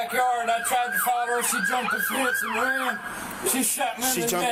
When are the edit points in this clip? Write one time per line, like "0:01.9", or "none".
none